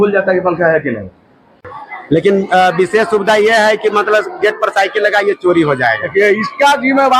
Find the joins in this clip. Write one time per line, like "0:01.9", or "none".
0:01.5